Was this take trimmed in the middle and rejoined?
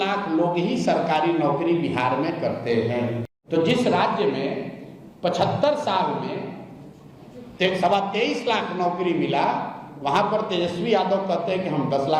yes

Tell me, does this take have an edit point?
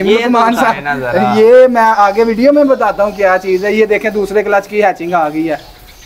no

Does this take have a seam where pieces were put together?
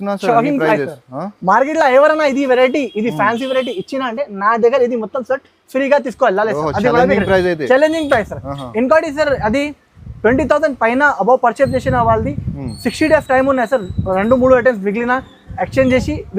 no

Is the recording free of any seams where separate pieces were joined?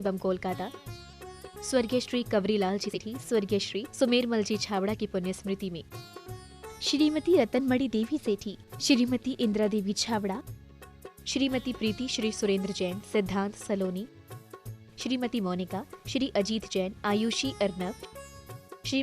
no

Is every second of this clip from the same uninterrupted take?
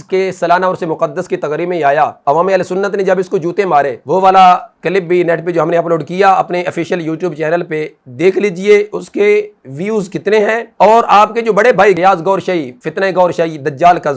yes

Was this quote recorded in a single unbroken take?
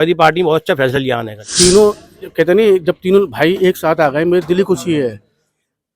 no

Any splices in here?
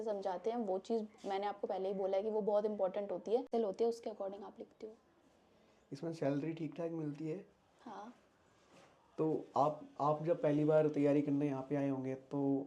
yes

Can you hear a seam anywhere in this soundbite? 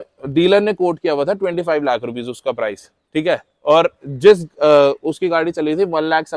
no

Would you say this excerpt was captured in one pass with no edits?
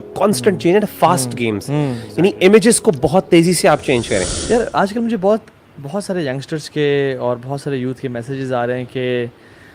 no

